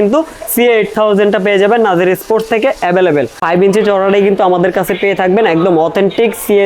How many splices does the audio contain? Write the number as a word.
one